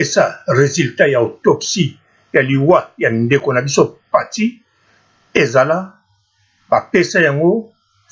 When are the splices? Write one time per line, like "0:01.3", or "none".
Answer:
none